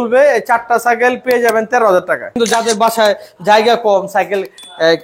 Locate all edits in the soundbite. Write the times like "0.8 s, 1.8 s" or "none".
2.4 s